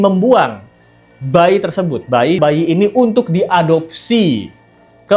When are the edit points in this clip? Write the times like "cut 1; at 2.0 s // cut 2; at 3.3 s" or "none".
cut 1; at 2.4 s